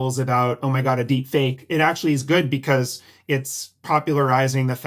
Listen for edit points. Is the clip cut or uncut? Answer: uncut